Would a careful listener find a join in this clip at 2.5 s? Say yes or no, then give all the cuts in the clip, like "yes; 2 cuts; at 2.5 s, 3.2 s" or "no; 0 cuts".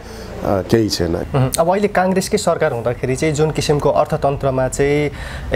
no; 1 cut; at 1.2 s